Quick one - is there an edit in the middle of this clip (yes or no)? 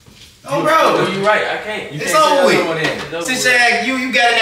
no